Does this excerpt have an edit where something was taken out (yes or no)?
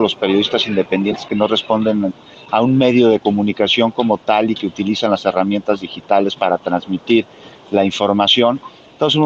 no